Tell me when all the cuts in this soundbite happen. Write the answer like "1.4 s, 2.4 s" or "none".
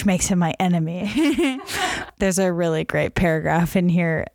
2.0 s